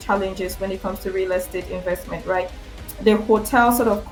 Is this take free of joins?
yes; 0 cuts

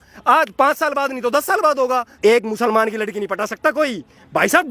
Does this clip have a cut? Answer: yes; 1 cut; at 2.2 s

